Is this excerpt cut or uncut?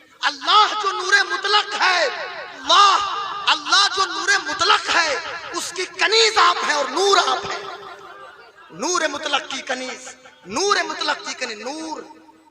cut